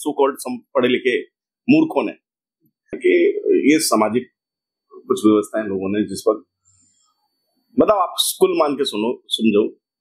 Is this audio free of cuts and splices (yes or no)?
no